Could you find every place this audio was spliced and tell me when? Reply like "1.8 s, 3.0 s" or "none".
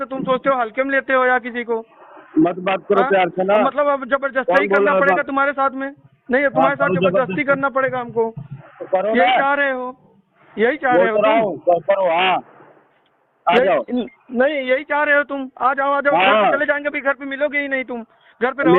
none